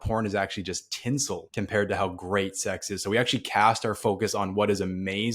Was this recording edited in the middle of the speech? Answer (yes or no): yes